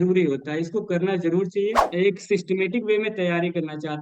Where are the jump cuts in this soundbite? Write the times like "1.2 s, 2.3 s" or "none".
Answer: 1.8 s